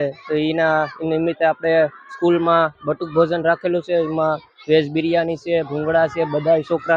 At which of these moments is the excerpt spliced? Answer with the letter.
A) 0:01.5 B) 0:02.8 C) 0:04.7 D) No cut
D